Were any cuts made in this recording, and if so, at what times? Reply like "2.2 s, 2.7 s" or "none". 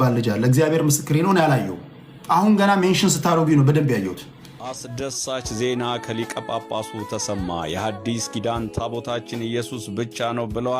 4.9 s